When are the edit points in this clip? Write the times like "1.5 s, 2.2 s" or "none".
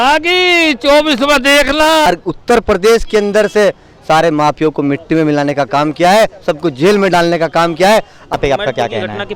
2.1 s, 8.3 s